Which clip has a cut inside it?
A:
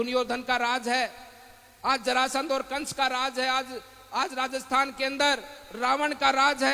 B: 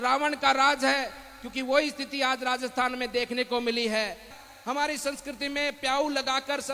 B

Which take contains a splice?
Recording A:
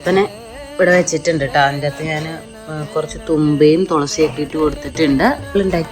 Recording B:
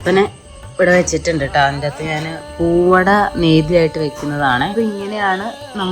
B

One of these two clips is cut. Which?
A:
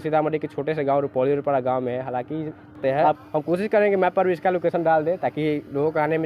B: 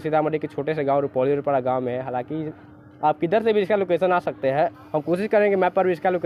A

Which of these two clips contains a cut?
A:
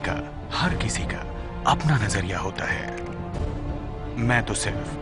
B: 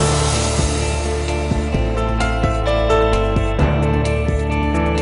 B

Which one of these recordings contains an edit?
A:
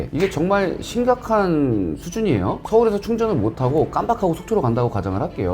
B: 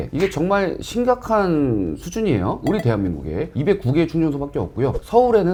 A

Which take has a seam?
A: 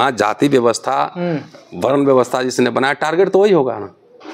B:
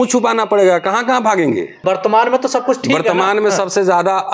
B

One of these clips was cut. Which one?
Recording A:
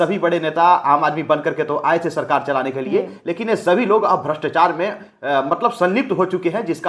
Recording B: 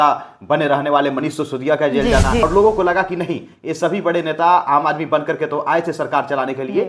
B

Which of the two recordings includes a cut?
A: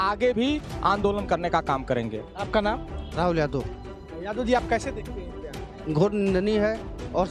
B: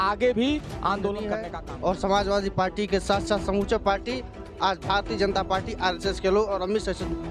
B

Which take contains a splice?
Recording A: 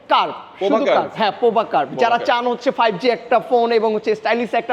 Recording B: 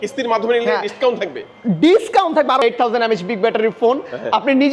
B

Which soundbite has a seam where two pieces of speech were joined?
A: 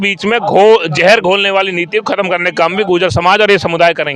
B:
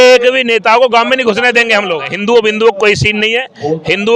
B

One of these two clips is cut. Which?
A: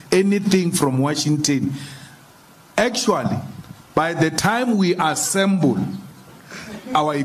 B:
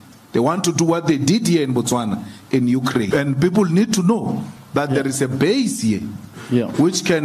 B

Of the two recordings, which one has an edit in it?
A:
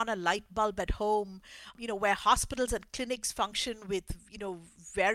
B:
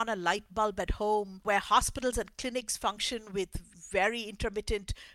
B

